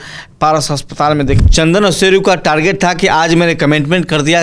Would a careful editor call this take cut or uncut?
cut